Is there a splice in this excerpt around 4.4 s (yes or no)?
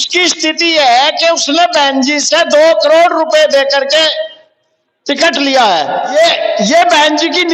no